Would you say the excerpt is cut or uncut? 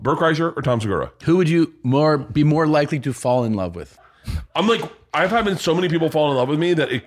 cut